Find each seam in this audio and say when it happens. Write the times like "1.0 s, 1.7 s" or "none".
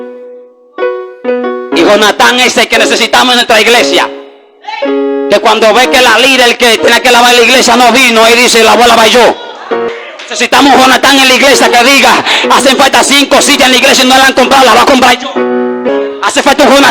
9.9 s, 15.9 s